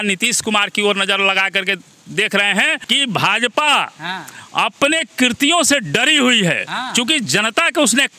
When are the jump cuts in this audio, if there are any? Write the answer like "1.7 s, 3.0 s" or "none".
2.8 s